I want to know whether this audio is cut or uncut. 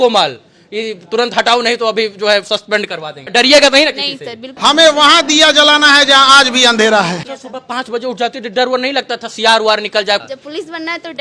cut